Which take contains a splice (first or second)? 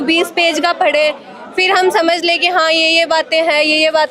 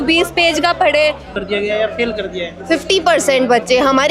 second